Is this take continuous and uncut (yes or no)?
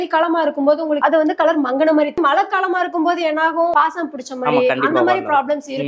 no